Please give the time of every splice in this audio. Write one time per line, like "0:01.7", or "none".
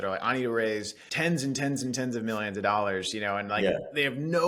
none